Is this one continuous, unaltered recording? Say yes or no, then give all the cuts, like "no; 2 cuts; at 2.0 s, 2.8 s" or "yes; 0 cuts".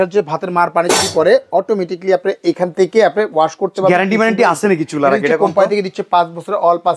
yes; 0 cuts